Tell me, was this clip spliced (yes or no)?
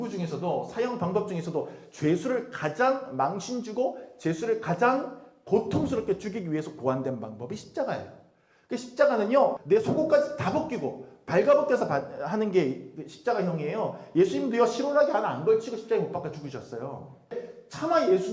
yes